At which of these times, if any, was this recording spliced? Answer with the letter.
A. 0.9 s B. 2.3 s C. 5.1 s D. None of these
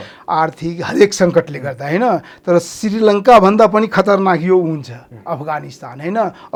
D